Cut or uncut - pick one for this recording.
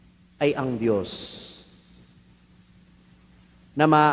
uncut